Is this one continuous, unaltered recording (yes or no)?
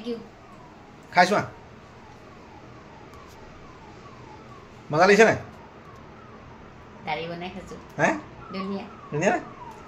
yes